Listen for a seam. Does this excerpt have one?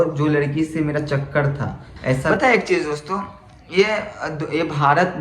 yes; 1 cut; at 2.3 s

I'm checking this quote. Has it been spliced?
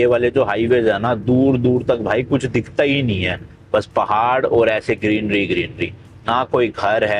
no; 0 cuts

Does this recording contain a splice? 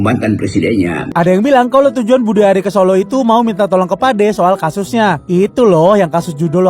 yes; 1 cut; at 1.1 s

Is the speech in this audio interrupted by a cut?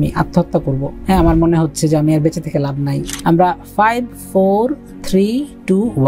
yes; 2 cuts; at 0.9 s, 3.0 s

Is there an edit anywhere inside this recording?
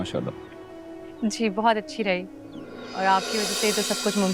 no; 0 cuts

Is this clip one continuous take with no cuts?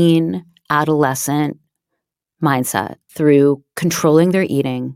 no; 1 cut; at 3.0 s

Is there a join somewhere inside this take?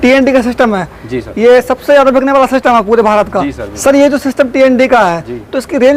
no; 0 cuts

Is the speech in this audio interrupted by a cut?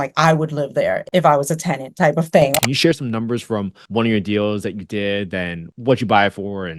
yes; 4 cuts; at 1.0 s, 2.6 s, 3.8 s, 5.6 s

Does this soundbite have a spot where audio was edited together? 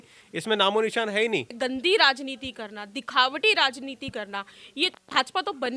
yes; 1 cut; at 1.5 s

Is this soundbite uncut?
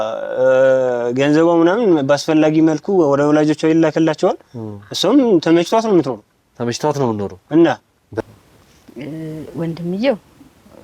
no; 1 cut; at 8.0 s

